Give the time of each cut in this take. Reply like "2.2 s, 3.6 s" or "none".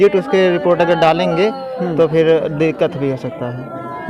none